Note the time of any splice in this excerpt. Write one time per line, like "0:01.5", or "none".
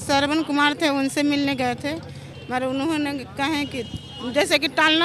none